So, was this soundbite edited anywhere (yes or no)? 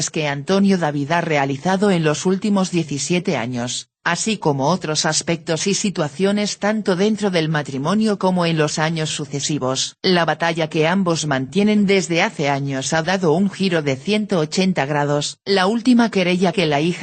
yes